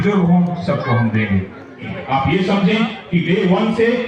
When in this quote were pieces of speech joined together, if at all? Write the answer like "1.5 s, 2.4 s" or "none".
1.9 s